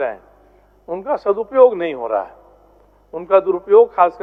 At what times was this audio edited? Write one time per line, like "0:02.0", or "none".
none